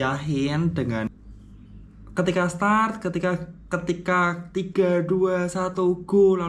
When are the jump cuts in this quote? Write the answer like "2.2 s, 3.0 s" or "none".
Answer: 1.1 s